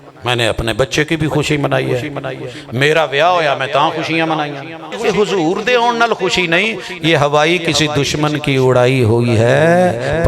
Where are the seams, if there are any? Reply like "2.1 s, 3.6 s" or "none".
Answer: 4.9 s